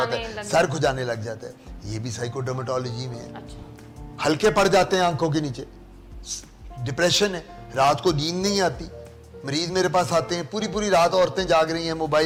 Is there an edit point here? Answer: no; 0 cuts

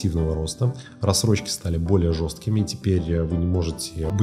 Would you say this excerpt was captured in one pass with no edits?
yes; 0 cuts

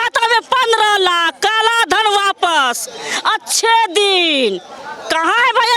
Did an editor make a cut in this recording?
no; 0 cuts

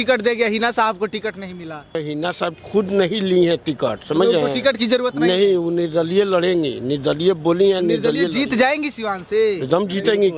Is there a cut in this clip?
yes; 1 cut; at 2.0 s

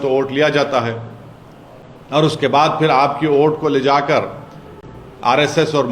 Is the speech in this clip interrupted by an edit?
no; 0 cuts

